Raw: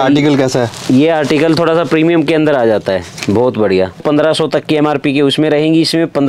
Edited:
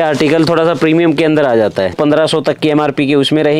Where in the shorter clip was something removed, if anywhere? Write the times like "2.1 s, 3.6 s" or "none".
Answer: 1.9 s